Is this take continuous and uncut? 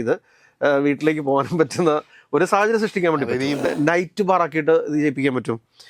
no; 1 cut; at 3.6 s

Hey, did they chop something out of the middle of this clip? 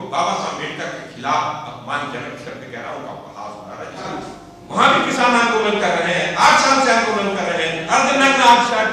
yes; 1 cut; at 4.1 s

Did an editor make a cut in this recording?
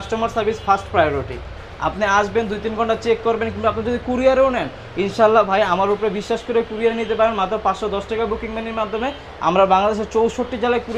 no; 0 cuts

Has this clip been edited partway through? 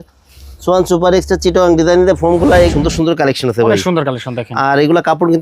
yes; 1 cut; at 2.7 s

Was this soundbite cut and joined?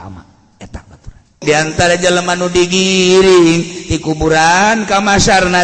yes; 1 cut; at 1.4 s

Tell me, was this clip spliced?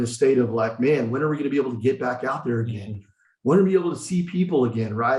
no; 0 cuts

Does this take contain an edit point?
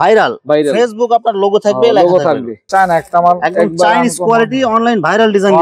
yes; 1 cut; at 2.7 s

